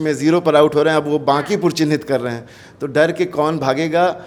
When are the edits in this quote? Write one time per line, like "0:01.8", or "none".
none